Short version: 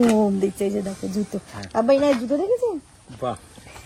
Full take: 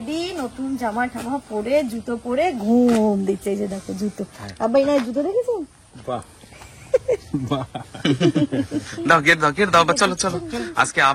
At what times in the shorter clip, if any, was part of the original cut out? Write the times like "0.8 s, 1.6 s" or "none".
none